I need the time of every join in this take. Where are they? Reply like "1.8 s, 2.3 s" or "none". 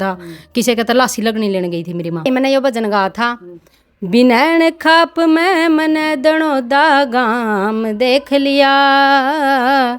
2.3 s